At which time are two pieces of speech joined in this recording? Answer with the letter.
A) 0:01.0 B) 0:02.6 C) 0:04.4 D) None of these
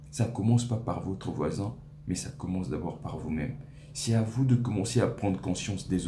D